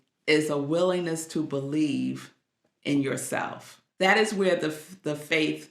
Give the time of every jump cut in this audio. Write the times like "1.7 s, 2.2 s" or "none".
3.9 s